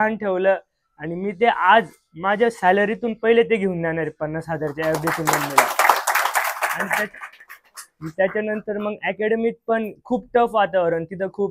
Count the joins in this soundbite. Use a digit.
0